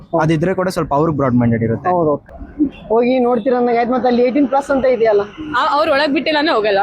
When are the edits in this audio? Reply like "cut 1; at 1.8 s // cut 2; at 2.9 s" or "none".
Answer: cut 1; at 1.9 s